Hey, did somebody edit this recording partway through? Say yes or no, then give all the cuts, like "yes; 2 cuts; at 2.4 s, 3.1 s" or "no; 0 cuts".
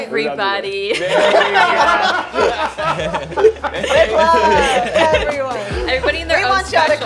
no; 0 cuts